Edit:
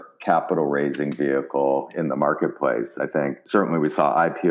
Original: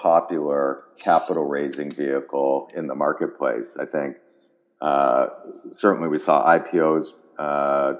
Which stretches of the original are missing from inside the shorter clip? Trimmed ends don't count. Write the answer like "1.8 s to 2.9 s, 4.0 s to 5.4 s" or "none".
4.2 s to 5.7 s

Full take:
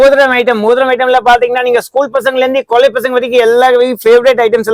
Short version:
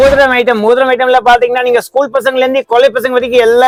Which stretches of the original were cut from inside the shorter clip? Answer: none

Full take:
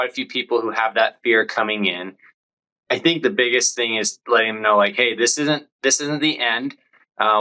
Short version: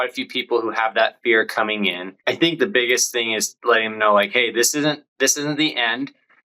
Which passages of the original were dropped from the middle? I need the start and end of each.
2.1 s to 2.7 s

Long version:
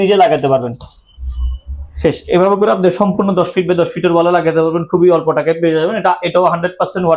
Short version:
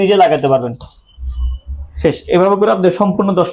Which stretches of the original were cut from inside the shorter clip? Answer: none

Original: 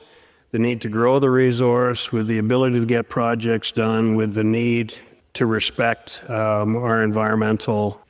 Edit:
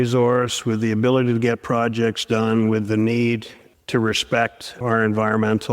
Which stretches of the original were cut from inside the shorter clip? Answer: 6.3 s to 6.8 s

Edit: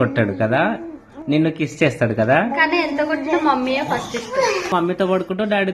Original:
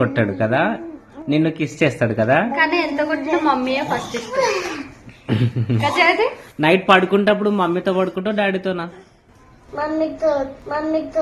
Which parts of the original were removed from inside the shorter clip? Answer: 4.7 s to 7.6 s

